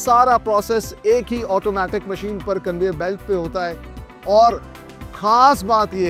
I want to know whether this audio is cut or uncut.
uncut